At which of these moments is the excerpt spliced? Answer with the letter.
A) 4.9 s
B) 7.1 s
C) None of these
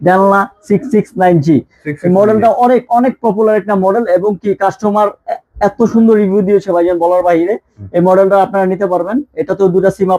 C